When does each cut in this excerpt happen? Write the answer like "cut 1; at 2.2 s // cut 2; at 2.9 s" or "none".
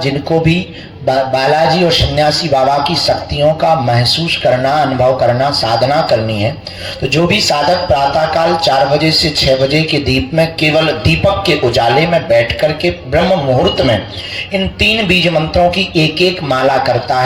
none